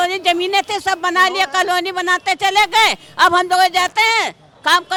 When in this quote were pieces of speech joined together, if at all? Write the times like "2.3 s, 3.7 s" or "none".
none